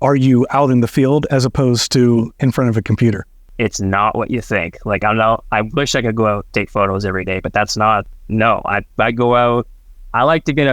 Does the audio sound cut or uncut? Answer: cut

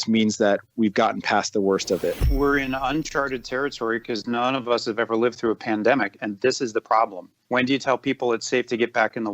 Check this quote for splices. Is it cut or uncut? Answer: cut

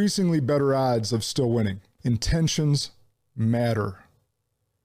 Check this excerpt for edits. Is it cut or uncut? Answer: cut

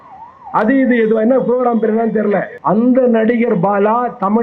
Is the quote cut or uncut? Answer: cut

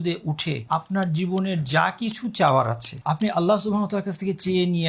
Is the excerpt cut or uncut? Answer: cut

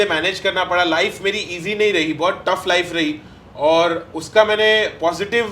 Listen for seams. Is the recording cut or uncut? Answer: uncut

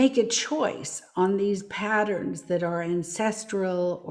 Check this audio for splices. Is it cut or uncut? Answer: uncut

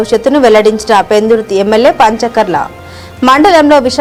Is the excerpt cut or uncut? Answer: uncut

